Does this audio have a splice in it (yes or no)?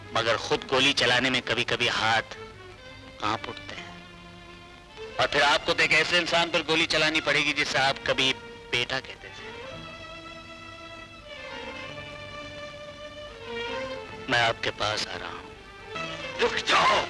yes